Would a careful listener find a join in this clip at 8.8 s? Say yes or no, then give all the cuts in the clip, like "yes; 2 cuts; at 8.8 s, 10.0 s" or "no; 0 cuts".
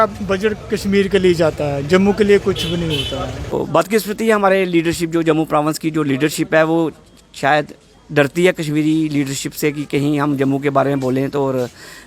no; 1 cut; at 3.5 s